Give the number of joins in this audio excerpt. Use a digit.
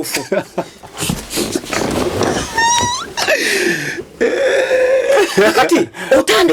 0